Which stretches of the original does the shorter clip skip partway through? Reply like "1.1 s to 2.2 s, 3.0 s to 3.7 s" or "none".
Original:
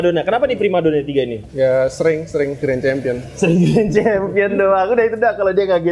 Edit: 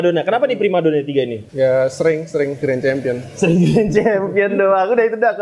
none